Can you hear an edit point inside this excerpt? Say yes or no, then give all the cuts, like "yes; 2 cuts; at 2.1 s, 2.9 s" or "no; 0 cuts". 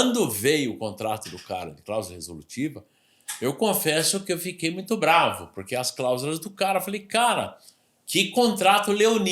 no; 0 cuts